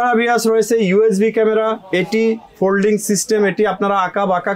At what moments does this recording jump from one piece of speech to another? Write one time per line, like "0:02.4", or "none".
none

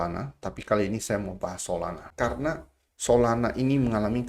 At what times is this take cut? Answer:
0:02.0

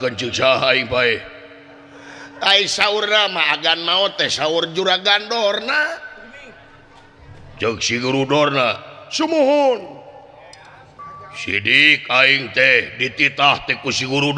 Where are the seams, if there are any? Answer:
none

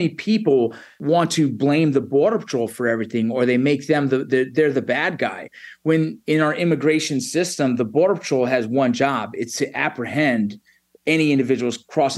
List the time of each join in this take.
0:00.9

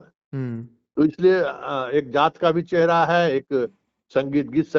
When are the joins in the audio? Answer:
none

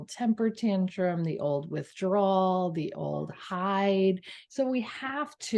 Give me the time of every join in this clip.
0:04.3

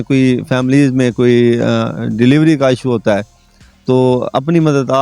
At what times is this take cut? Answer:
none

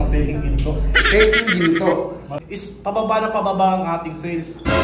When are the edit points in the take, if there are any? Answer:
0:02.3

